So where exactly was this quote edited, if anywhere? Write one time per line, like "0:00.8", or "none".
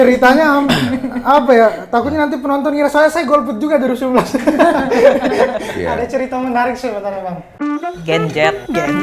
0:07.5